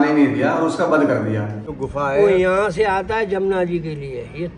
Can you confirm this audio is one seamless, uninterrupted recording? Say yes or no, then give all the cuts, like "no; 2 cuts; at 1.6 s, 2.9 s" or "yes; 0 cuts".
no; 1 cut; at 1.7 s